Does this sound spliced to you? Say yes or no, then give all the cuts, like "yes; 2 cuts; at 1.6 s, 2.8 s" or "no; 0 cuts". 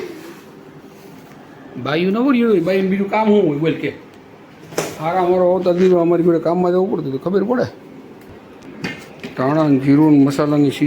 yes; 1 cut; at 8.2 s